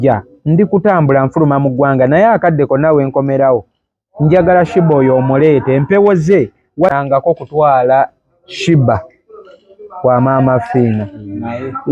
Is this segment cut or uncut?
cut